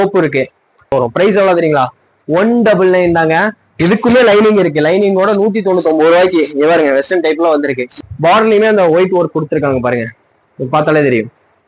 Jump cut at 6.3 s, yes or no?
no